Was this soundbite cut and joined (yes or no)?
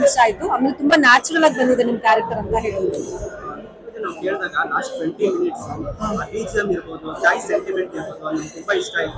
no